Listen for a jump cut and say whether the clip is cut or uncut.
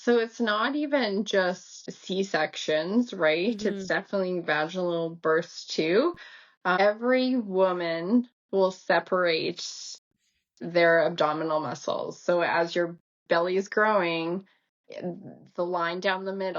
cut